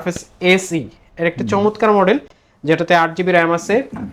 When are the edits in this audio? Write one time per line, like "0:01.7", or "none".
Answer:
none